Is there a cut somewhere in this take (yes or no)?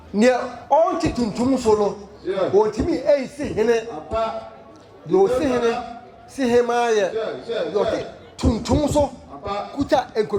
no